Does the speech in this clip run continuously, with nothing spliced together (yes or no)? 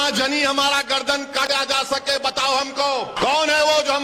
no